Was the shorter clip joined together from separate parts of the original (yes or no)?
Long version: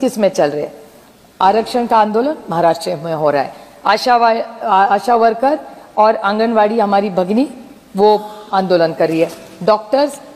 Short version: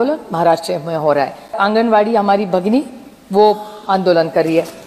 yes